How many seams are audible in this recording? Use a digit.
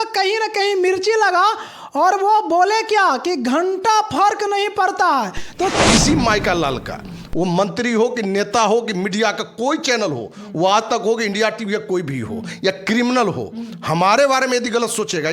1